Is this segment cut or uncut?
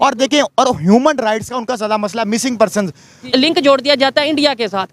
cut